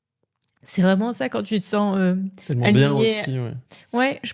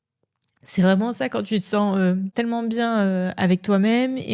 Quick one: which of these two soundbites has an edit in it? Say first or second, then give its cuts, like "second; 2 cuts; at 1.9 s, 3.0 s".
second; 1 cut; at 2.3 s